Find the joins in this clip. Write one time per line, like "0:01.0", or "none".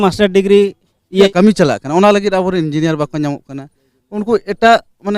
0:01.3